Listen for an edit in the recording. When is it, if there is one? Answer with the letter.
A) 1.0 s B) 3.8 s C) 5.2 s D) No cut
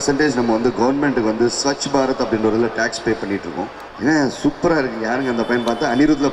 B